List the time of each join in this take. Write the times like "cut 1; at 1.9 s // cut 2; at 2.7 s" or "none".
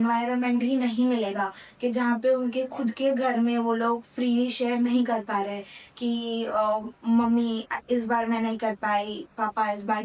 none